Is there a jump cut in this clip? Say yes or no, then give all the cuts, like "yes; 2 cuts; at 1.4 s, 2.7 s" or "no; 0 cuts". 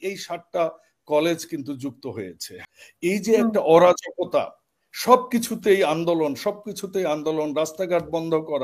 yes; 1 cut; at 2.5 s